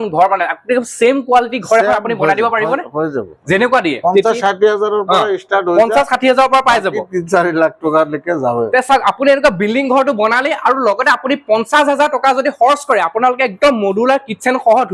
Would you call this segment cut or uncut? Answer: cut